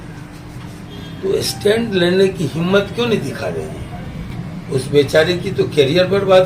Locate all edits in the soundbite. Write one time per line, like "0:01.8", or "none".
0:04.3